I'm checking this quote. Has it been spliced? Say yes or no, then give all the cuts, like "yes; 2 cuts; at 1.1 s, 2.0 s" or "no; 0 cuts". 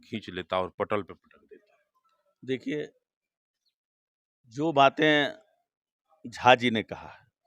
no; 0 cuts